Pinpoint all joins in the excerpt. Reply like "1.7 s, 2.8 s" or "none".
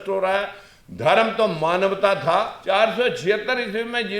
2.5 s